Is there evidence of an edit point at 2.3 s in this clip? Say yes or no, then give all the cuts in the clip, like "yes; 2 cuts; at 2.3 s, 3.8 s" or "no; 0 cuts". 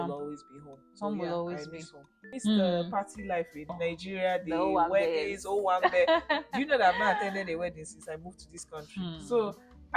yes; 2 cuts; at 2.3 s, 3.7 s